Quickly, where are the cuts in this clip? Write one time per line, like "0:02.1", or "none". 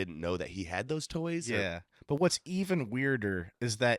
none